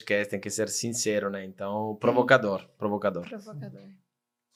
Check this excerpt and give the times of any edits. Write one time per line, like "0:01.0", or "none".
none